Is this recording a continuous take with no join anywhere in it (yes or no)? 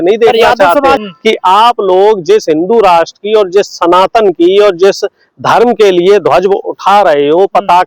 no